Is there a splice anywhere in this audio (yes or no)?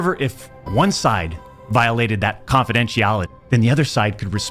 yes